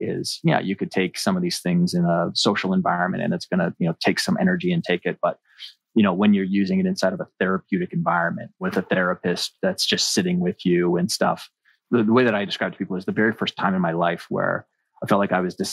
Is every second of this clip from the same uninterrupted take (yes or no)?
no